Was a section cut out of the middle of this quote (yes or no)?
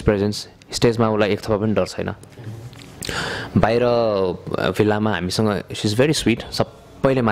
no